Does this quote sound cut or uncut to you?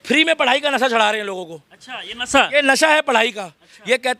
uncut